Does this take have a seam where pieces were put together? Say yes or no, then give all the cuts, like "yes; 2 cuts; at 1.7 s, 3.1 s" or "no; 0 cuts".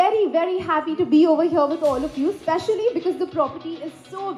no; 0 cuts